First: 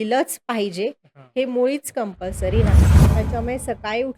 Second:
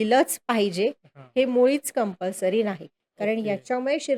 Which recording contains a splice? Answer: first; 1 cut; at 2.9 s

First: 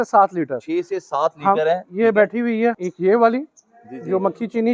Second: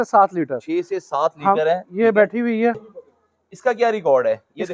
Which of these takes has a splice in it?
second; 1 cut; at 2.9 s

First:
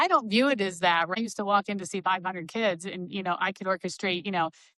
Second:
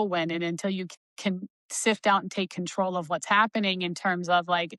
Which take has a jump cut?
first; 1 cut; at 1.2 s

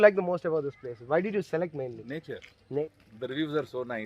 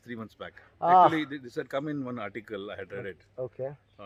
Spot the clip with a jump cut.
first; 1 cut; at 2.8 s

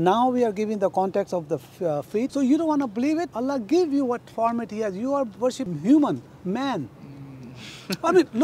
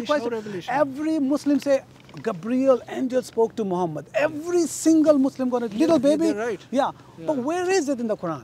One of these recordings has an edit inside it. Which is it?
first; 3 cuts; at 2.3 s, 3.3 s, 5.6 s

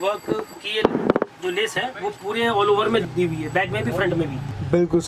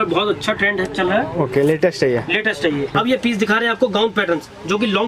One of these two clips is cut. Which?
second; 1 cut; at 2.9 s

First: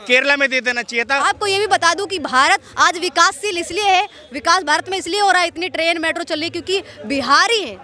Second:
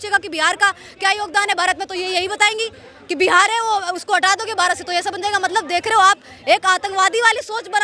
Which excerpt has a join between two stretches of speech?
first; 2 cuts; at 1.2 s, 2.7 s

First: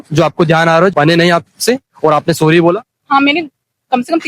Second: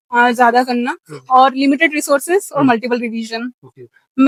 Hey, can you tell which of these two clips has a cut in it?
first; 1 cut; at 0.9 s

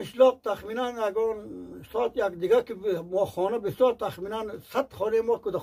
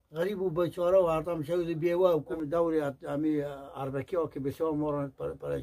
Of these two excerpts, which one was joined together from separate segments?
second; 1 cut; at 2.2 s

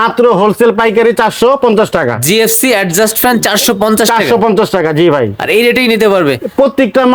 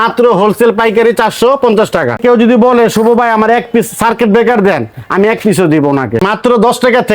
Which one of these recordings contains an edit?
second; 2 cuts; at 2.2 s, 6.2 s

